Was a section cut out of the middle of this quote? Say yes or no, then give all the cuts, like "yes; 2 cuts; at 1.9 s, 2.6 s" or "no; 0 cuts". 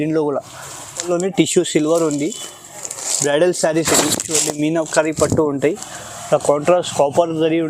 yes; 1 cut; at 1.1 s